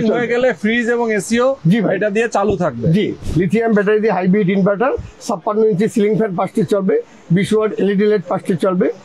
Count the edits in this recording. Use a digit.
1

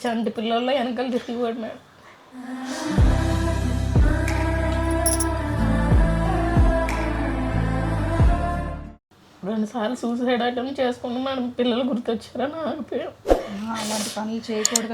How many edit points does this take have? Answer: 0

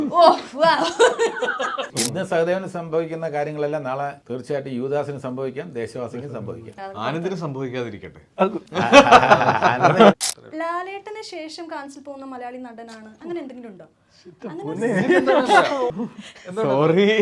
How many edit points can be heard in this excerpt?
5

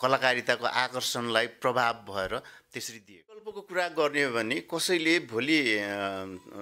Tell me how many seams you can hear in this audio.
1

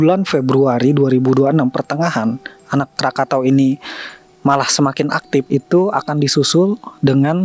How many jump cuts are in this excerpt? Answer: 1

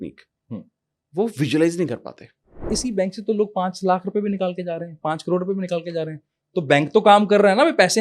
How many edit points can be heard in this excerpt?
1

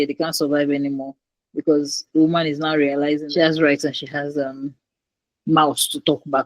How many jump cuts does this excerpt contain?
1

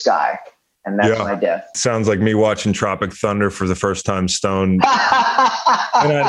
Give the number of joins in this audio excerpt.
1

